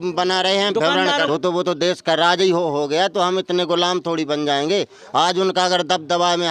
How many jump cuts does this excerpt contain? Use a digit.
1